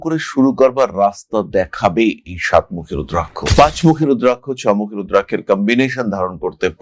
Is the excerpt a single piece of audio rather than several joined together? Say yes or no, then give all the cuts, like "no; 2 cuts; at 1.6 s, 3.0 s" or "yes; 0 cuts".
no; 1 cut; at 3.4 s